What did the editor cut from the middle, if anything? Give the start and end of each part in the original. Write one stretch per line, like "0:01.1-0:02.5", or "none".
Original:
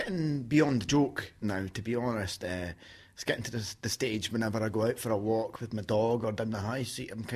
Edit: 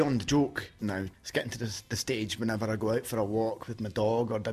0:01.8-0:03.1